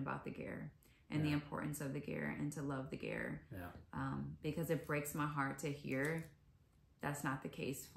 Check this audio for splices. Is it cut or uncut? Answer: uncut